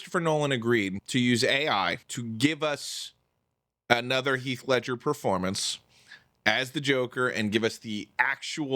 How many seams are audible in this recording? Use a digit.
2